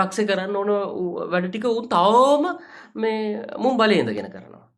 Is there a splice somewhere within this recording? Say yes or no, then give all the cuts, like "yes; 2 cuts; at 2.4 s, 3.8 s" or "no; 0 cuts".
no; 0 cuts